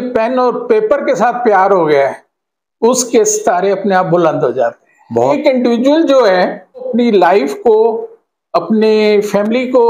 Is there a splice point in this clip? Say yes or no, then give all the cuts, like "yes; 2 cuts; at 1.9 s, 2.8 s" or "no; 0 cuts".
yes; 2 cuts; at 5.4 s, 6.9 s